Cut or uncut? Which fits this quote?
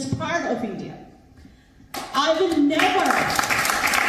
uncut